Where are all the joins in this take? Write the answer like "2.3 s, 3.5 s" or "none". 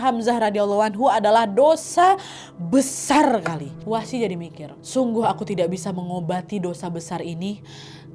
3.7 s